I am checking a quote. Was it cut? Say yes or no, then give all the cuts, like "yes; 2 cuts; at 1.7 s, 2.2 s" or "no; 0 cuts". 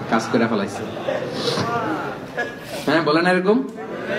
no; 0 cuts